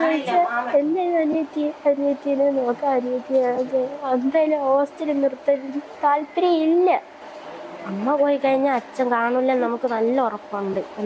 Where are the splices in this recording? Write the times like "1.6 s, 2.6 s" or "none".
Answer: 7.3 s